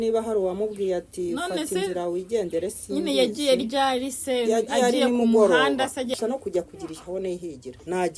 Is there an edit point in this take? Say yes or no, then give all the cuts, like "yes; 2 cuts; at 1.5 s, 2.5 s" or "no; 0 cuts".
yes; 1 cut; at 6.2 s